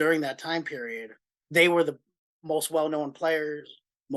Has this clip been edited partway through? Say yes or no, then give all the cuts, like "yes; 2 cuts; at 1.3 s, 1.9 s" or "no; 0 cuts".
no; 0 cuts